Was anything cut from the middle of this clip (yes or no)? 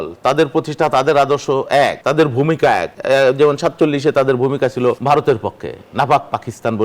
yes